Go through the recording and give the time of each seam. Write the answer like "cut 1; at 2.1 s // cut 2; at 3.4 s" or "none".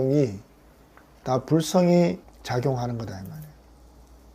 cut 1; at 2.3 s